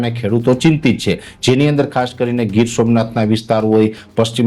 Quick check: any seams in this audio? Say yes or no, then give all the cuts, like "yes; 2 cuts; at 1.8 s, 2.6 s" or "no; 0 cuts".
no; 0 cuts